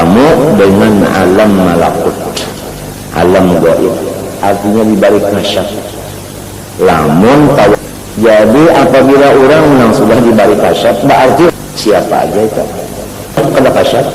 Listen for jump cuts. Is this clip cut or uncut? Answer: cut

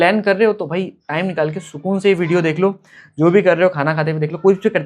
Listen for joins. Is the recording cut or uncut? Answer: uncut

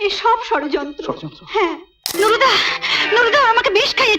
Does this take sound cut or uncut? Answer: cut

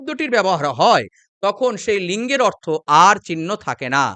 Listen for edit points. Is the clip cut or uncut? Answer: uncut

